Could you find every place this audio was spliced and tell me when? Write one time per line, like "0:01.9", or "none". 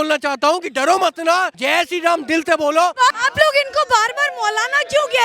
0:01.6
0:03.2